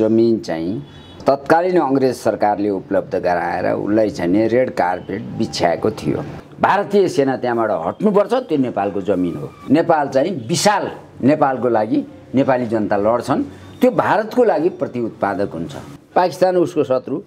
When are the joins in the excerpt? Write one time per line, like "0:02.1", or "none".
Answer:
0:06.4
0:09.5
0:15.9